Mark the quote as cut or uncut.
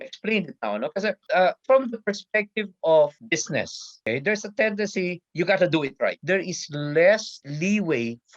cut